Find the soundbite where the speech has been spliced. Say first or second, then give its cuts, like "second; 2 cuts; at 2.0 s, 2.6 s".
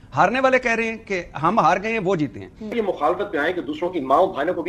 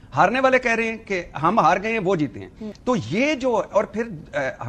first; 1 cut; at 2.7 s